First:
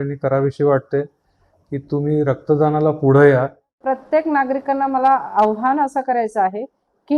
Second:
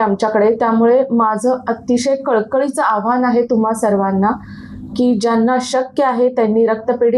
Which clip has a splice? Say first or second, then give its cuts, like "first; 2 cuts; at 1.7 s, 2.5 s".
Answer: first; 1 cut; at 3.8 s